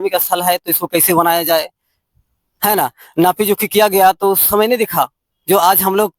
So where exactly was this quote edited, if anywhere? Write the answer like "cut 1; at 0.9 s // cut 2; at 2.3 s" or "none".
none